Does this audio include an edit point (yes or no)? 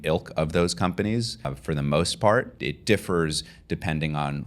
yes